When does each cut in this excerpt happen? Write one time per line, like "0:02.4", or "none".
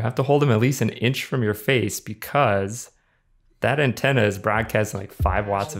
none